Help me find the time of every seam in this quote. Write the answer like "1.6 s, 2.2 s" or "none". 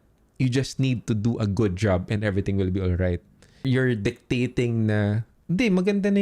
3.6 s, 5.3 s